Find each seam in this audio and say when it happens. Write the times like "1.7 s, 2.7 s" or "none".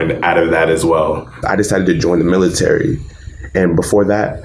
1.4 s

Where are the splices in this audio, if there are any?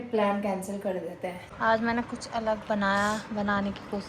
1.4 s

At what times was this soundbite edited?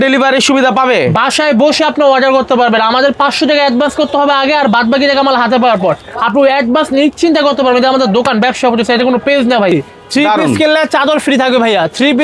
9.7 s

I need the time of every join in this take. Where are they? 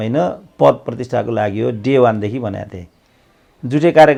none

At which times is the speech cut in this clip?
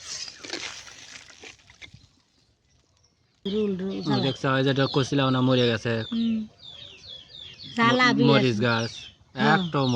3.4 s

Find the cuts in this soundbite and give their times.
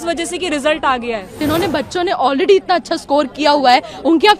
1.4 s

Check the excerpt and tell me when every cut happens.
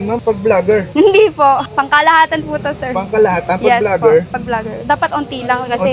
0.9 s, 1.6 s, 4.3 s

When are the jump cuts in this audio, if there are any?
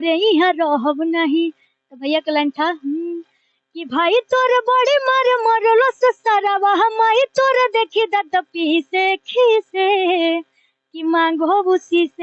none

